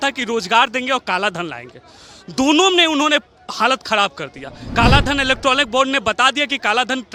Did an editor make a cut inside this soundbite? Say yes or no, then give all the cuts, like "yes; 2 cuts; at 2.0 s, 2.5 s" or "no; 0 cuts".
no; 0 cuts